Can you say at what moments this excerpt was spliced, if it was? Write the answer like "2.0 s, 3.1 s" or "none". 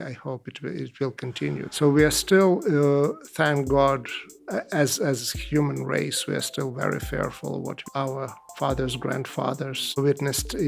1.7 s, 7.9 s, 9.8 s